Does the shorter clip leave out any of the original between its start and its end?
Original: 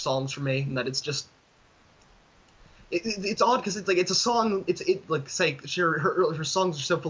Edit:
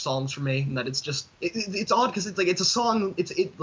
yes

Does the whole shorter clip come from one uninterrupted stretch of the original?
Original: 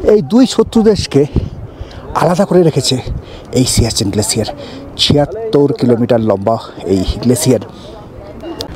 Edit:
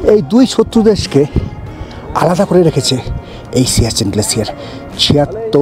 yes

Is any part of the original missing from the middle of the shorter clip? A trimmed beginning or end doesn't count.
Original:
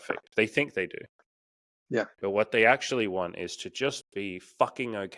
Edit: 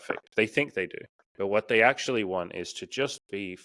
yes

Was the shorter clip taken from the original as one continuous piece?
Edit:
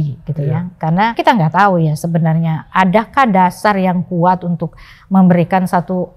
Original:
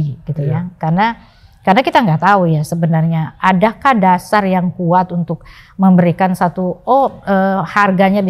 no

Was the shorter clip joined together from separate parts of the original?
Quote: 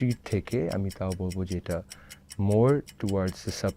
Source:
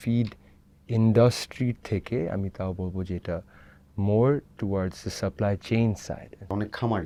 no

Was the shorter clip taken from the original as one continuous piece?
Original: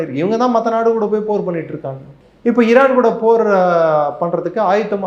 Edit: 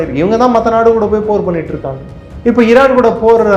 yes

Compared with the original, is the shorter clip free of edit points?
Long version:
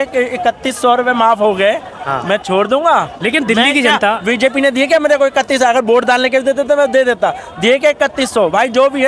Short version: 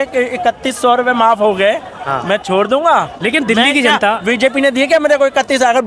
yes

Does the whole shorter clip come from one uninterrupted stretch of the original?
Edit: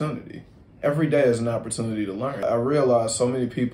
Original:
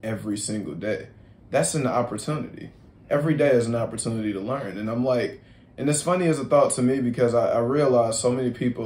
no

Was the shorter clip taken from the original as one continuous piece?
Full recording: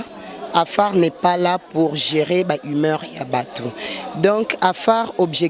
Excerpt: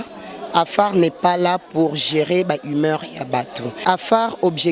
no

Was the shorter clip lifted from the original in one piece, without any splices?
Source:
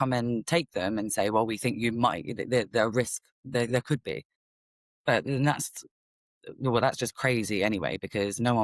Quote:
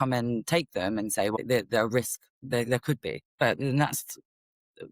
no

